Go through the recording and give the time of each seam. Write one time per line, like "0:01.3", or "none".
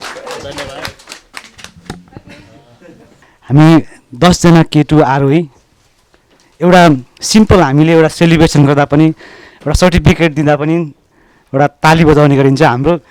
0:03.1